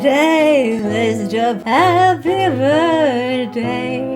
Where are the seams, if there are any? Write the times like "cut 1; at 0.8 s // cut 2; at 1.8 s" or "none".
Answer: none